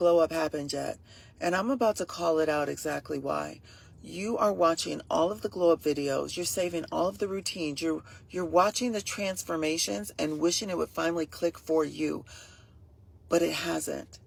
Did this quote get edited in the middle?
no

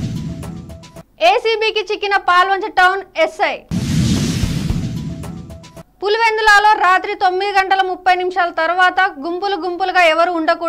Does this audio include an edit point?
yes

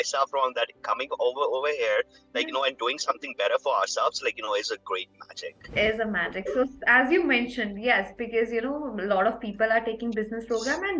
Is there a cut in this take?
yes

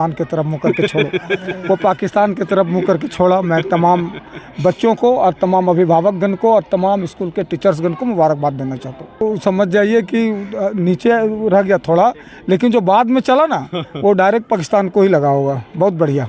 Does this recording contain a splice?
yes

